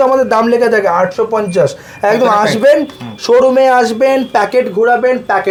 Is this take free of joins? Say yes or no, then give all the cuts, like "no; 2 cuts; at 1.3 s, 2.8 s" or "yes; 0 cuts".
yes; 0 cuts